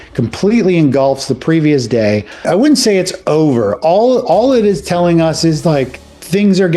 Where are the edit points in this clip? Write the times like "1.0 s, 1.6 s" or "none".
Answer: 2.4 s